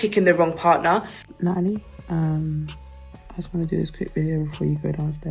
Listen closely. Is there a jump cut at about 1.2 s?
yes; 1 cut; at 1.2 s

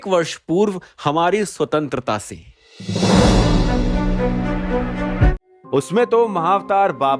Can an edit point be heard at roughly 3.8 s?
no; 1 cut; at 5.3 s

